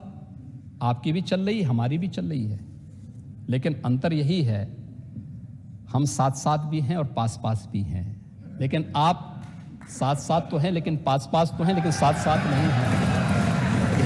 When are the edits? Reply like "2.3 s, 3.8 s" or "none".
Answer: none

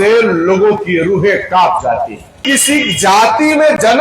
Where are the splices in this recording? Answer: 2.4 s

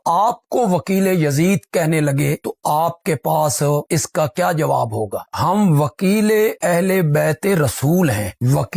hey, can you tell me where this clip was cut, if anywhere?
5.2 s

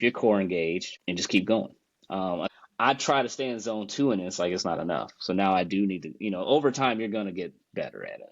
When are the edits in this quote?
0.9 s, 2.5 s

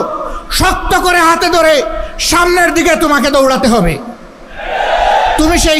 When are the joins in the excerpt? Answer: none

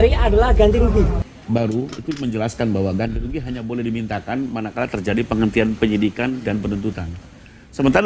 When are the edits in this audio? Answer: 1.2 s

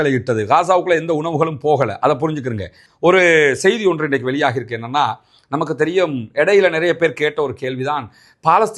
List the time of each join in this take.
2.8 s

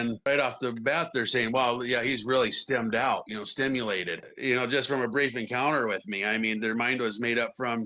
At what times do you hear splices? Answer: none

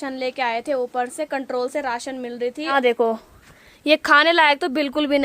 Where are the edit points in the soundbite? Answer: 2.7 s

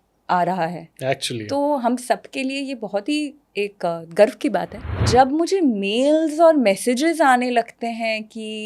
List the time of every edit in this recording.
5.0 s

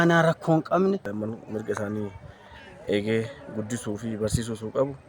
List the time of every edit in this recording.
1.1 s

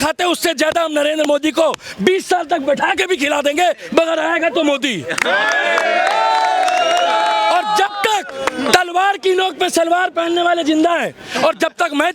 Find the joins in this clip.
none

